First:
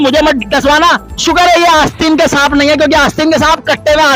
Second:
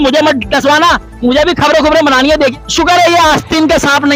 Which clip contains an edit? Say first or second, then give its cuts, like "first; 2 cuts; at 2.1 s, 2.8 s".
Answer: first; 1 cut; at 1.1 s